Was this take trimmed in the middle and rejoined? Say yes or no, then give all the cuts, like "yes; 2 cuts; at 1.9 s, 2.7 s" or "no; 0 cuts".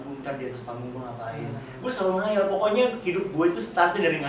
no; 0 cuts